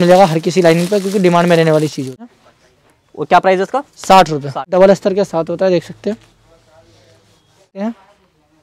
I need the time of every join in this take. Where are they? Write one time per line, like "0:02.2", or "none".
0:02.3
0:04.7
0:07.8